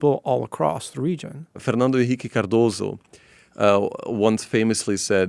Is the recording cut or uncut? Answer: cut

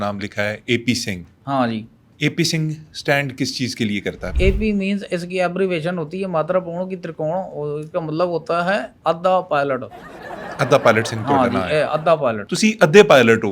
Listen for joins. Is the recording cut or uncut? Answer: cut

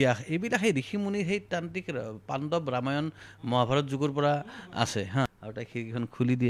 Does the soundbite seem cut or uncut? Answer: cut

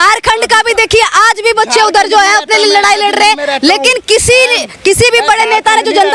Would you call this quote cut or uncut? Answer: uncut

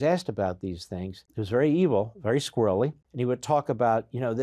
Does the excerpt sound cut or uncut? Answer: cut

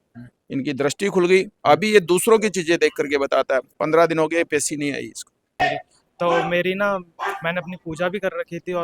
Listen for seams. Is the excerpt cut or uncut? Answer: cut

